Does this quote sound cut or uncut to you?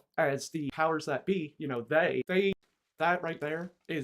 cut